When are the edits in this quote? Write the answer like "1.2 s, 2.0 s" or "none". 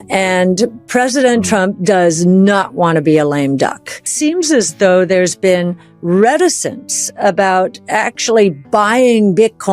4.1 s